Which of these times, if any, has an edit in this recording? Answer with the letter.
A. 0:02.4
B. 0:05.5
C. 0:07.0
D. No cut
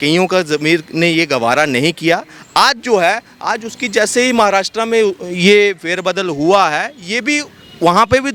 D